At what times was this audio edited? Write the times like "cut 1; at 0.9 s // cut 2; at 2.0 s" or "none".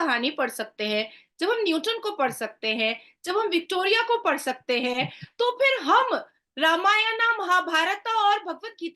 none